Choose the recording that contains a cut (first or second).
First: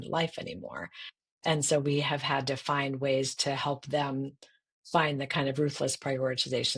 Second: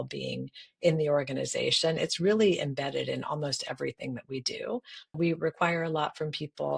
second